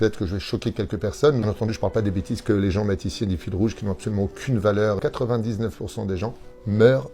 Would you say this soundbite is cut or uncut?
cut